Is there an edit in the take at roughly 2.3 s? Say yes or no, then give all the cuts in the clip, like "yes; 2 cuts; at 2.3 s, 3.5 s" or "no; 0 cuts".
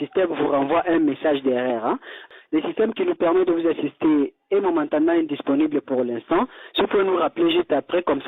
yes; 1 cut; at 2.3 s